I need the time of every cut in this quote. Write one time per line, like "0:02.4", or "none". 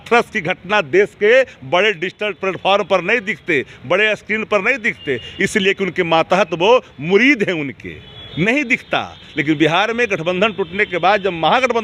none